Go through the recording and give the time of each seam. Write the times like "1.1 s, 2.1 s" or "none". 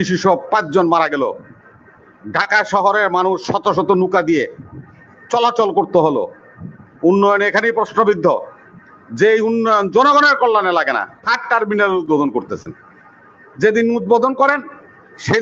11.3 s